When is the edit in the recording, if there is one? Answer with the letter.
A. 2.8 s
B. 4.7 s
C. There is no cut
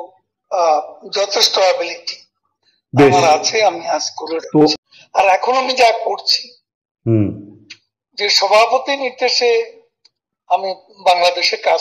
B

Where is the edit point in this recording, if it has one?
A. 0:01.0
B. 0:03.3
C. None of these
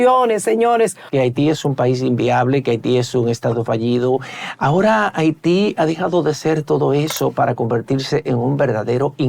A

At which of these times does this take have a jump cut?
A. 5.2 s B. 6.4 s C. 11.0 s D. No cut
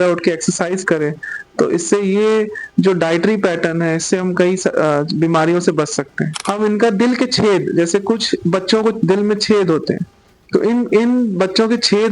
B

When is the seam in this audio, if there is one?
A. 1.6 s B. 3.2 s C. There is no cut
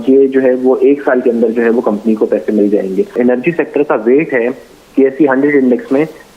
B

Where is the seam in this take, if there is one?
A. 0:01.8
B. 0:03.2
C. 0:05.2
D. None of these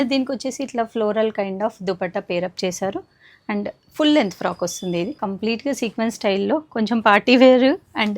C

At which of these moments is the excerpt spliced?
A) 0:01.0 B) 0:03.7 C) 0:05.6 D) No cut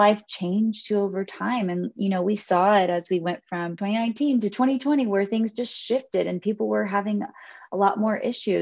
B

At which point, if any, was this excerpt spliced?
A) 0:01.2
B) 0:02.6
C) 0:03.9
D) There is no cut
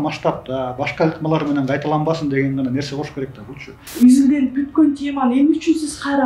C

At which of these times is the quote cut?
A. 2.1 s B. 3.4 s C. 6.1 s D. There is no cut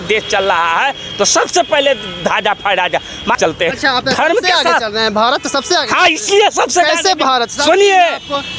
B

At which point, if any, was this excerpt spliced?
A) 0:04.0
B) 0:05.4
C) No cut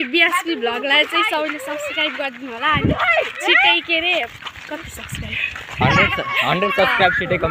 C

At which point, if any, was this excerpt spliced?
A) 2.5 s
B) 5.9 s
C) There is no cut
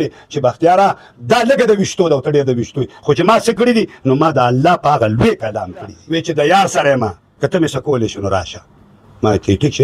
B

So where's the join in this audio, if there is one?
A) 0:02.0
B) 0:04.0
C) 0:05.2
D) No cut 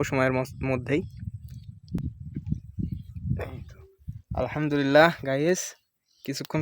A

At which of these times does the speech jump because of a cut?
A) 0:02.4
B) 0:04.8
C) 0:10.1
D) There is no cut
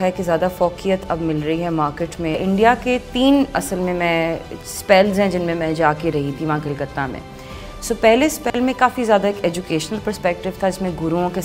A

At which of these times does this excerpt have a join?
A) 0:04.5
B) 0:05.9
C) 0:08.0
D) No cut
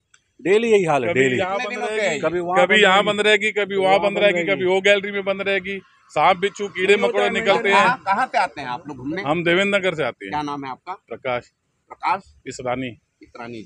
D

